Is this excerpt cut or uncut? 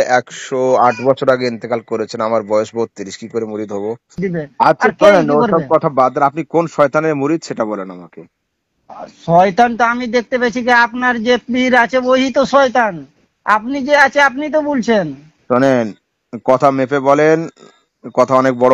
cut